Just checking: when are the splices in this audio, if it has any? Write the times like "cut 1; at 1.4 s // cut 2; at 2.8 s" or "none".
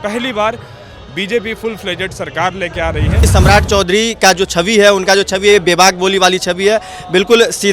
cut 1; at 3.2 s